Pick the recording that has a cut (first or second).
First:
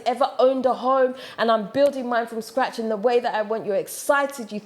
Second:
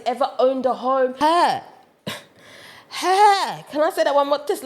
second